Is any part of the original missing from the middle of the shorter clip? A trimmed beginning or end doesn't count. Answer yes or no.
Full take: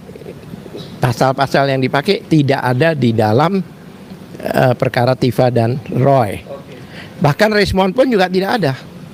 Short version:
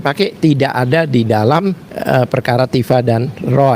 yes